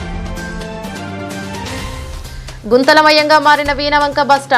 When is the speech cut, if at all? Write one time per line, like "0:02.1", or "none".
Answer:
0:01.6